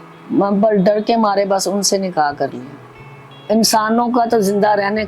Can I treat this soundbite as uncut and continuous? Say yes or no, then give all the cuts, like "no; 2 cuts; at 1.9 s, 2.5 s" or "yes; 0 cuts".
no; 1 cut; at 3.4 s